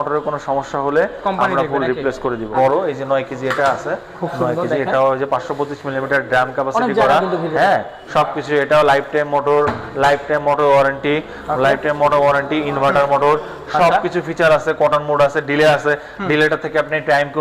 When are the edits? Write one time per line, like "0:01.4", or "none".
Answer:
0:02.5